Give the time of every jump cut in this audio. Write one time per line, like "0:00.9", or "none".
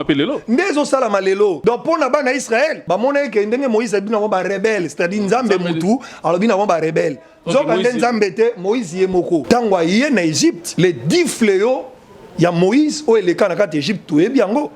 0:01.6
0:02.8
0:09.4
0:10.7